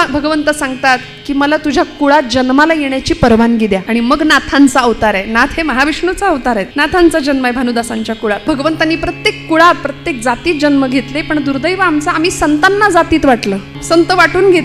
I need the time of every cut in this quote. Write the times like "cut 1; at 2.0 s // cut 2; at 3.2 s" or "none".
cut 1; at 3.8 s // cut 2; at 6.9 s // cut 3; at 8.5 s // cut 4; at 13.7 s